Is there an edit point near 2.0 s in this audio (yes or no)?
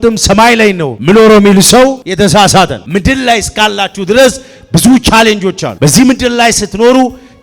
yes